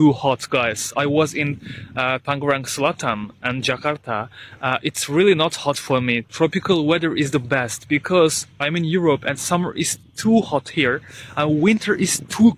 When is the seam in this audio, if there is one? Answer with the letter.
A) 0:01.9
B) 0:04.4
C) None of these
C